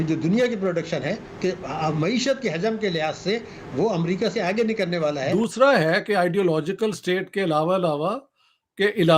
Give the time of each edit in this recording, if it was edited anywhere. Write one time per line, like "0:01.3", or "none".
0:05.3